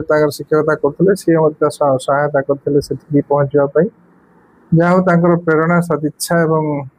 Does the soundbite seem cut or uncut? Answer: uncut